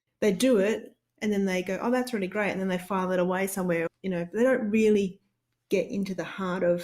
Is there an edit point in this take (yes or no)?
yes